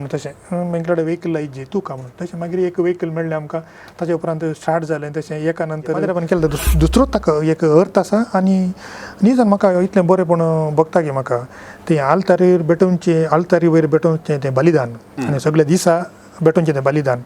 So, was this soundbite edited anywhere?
yes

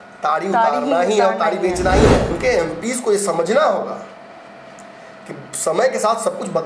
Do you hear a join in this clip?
yes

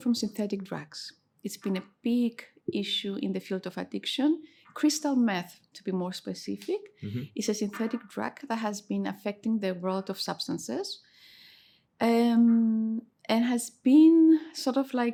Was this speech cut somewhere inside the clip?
no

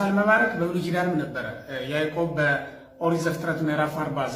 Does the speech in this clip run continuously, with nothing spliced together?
yes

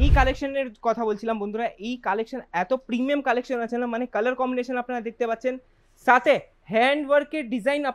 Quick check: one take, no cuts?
yes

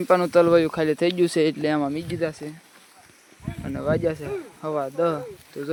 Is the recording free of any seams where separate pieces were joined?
yes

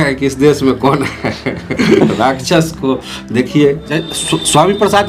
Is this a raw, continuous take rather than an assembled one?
no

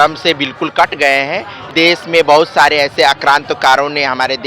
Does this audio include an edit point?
yes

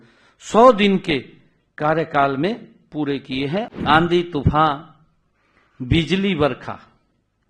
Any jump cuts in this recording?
yes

